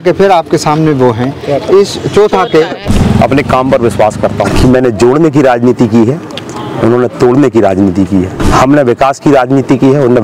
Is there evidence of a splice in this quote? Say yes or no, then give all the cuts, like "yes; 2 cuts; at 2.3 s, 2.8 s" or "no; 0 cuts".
yes; 3 cuts; at 2.9 s, 4.5 s, 8.4 s